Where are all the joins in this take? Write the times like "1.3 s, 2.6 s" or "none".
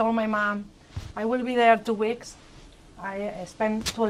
none